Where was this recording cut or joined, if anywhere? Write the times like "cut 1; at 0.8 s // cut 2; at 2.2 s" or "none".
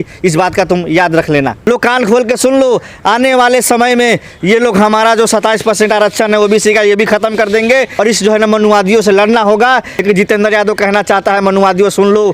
cut 1; at 1.6 s // cut 2; at 7.9 s // cut 3; at 10.0 s